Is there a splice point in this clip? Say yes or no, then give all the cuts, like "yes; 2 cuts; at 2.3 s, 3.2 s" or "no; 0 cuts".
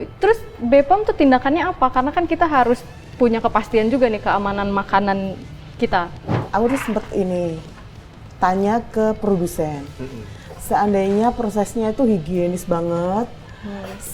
yes; 1 cut; at 6.4 s